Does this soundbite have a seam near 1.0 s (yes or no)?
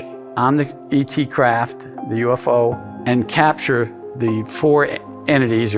no